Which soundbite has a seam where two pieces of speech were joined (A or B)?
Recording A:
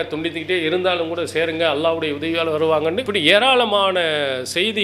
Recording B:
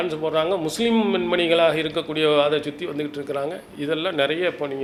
A